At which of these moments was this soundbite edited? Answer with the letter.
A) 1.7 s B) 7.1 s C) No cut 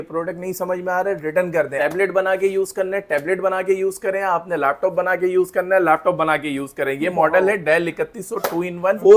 A